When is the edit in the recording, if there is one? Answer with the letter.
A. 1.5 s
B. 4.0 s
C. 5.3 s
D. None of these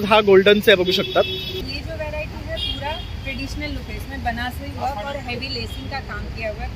A